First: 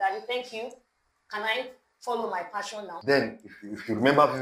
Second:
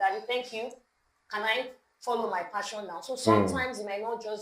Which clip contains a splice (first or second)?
first